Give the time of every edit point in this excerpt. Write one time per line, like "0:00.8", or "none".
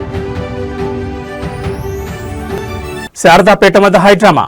none